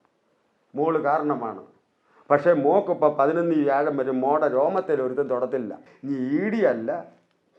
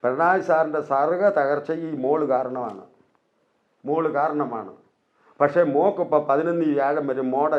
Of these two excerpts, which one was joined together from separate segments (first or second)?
first